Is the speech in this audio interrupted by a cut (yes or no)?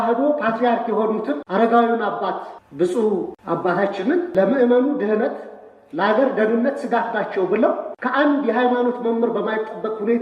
yes